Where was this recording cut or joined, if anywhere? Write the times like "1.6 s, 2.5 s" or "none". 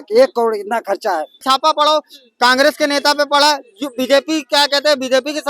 1.4 s